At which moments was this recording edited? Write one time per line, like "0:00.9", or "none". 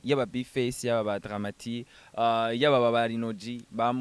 none